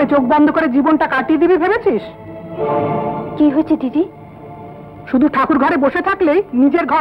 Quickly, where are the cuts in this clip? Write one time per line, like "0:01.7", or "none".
none